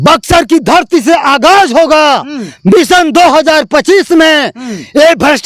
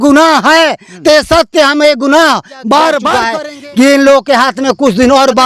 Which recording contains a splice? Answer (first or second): second